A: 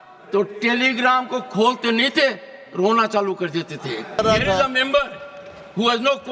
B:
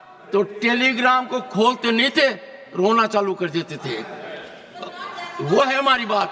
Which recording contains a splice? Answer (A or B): A